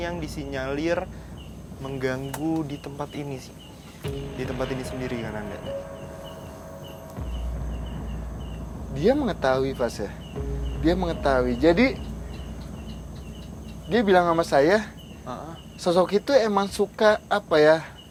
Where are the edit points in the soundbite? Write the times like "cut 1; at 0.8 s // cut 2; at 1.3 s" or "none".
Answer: none